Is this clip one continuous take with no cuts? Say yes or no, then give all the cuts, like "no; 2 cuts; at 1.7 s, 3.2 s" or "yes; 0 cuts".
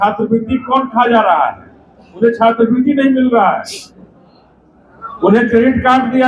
yes; 0 cuts